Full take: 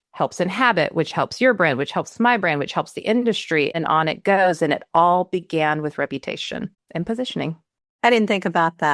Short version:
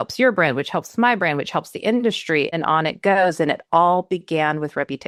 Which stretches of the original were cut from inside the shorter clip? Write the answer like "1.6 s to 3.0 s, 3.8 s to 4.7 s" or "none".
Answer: none

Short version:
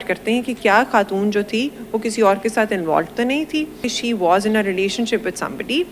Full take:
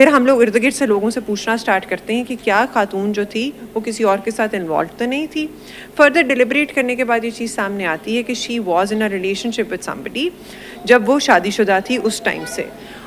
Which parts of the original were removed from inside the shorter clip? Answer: 5.7 s to 8.4 s

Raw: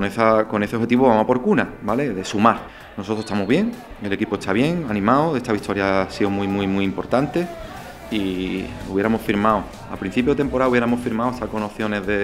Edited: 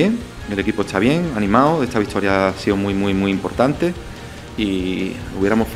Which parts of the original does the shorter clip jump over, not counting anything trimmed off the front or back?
none

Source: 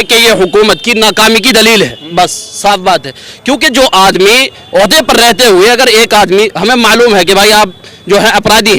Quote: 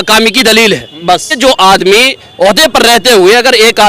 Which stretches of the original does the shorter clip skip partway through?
2.4 s to 3.7 s

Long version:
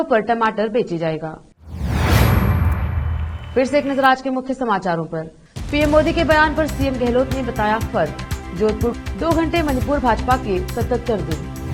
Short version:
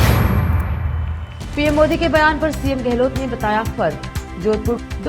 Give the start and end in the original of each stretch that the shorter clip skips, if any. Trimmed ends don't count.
3.3 s to 5.4 s

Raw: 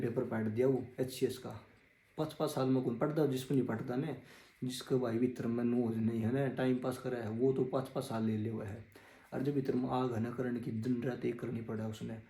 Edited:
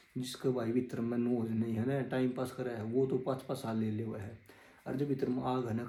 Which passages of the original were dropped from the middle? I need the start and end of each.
none

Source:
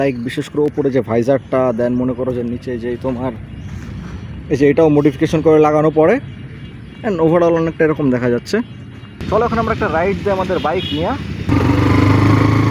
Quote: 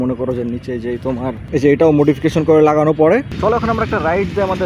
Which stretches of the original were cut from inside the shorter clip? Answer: 3.4 s to 4.4 s, 6.3 s to 9.2 s

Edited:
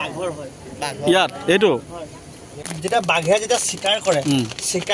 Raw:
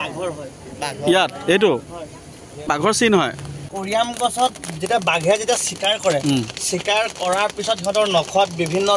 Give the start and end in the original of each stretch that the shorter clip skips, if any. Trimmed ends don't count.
2.6 s to 4.6 s

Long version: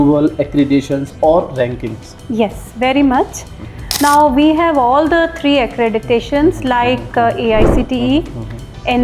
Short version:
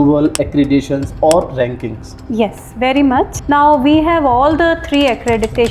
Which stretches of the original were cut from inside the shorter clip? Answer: 3.4 s to 3.9 s

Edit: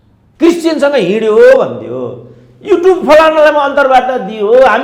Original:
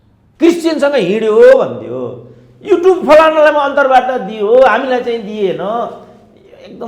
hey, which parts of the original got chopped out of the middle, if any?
none

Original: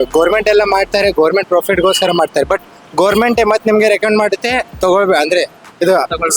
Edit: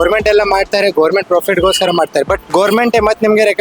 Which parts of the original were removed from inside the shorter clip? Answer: 2.6 s to 2.8 s

